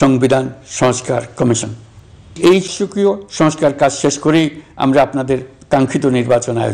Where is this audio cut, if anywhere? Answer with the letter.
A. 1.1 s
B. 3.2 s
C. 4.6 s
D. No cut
D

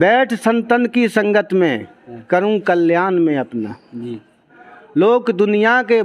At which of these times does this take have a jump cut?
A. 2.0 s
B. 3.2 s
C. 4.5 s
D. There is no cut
C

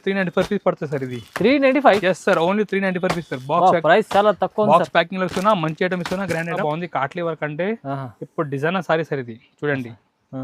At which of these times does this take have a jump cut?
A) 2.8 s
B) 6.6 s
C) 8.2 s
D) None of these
B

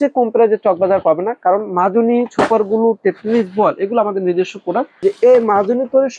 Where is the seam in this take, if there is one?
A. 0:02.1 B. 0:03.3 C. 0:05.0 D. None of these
C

